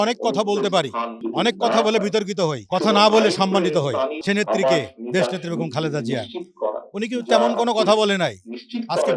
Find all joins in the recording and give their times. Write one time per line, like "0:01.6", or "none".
0:01.2
0:02.6
0:04.2